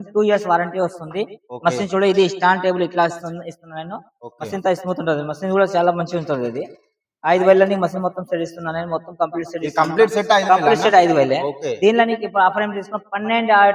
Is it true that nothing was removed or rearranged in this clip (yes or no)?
yes